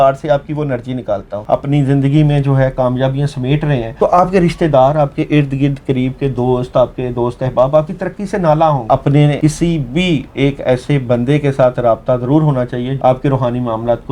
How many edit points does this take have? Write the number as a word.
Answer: four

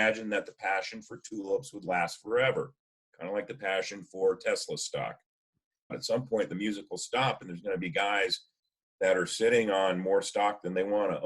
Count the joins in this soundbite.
one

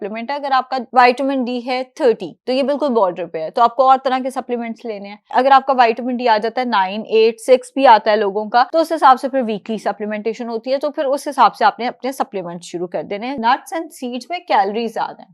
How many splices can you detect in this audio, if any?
four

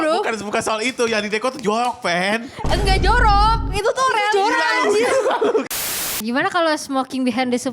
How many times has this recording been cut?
one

